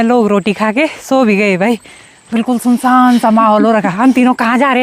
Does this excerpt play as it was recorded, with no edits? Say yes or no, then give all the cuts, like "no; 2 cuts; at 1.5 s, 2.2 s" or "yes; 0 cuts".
yes; 0 cuts